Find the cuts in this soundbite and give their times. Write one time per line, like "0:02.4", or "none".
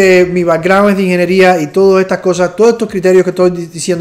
none